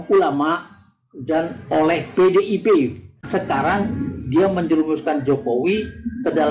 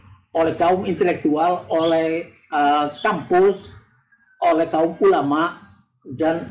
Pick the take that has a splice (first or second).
first